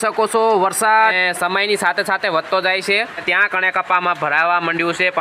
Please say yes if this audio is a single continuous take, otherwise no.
no